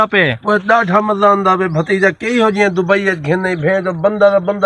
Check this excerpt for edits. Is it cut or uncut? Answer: uncut